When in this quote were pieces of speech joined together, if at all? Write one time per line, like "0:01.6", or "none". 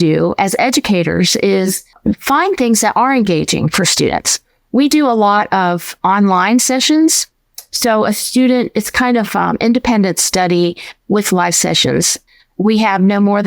0:01.9
0:12.2